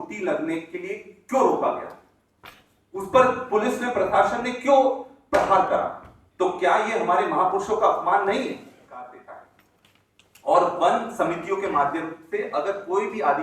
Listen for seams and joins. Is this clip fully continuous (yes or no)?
no